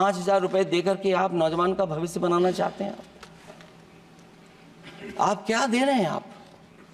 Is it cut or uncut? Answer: uncut